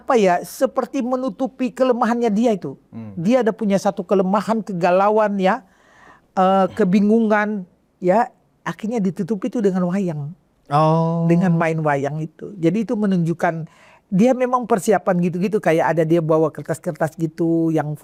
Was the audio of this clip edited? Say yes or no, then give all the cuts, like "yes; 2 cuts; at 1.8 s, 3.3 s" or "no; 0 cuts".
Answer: no; 0 cuts